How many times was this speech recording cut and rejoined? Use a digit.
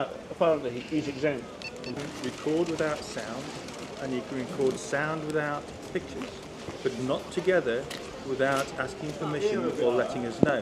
1